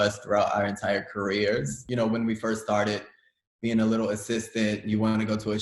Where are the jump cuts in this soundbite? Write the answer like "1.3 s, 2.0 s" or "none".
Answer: none